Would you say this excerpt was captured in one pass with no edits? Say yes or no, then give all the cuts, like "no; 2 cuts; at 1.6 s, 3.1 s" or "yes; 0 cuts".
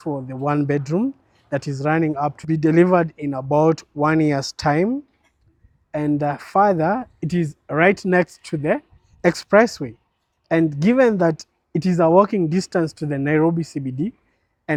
yes; 0 cuts